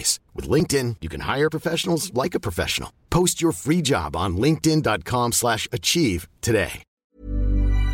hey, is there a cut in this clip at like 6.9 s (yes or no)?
yes